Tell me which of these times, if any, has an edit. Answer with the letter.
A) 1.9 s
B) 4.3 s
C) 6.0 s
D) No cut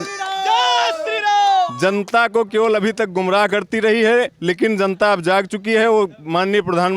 D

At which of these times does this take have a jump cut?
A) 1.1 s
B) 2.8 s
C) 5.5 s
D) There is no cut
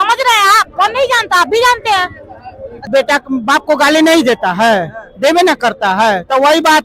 B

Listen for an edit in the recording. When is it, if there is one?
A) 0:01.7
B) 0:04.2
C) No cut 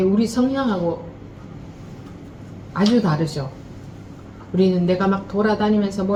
C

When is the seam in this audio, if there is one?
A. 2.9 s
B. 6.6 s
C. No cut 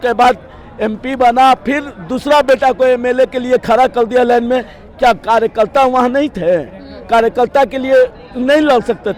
C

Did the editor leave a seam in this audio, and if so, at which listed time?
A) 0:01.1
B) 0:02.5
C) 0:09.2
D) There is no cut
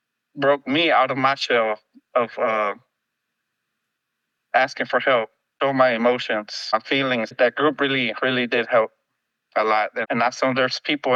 D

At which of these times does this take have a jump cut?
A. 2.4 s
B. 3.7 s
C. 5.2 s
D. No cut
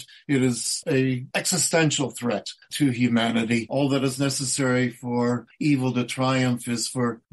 B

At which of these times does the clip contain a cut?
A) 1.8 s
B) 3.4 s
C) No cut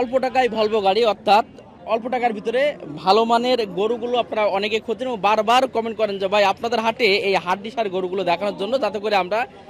A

